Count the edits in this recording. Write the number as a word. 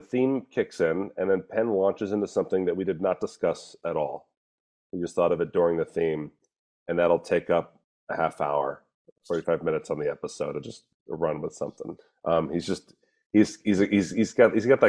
one